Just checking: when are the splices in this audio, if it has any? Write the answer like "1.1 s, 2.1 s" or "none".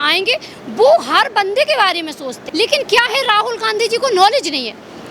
2.4 s